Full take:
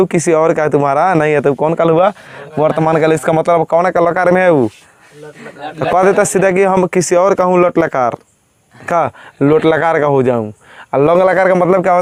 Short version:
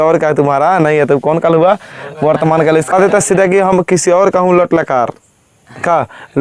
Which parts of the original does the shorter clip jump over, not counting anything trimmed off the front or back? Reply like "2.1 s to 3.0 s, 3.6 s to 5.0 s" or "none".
3.3 s to 6.0 s